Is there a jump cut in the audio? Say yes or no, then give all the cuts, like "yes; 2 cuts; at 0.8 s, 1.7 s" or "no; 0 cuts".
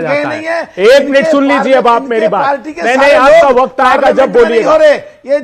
no; 0 cuts